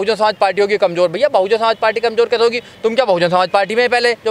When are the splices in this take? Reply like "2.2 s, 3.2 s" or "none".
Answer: none

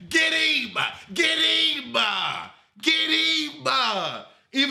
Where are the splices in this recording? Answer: none

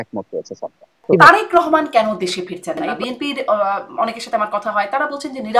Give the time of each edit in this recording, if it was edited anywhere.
1.2 s, 2.9 s

